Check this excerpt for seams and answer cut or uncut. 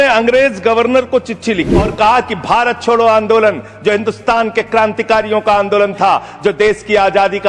cut